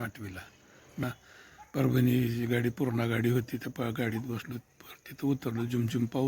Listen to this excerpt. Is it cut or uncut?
cut